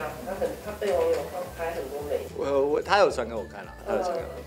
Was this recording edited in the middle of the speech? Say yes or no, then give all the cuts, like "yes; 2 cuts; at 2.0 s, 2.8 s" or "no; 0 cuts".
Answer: yes; 1 cut; at 2.3 s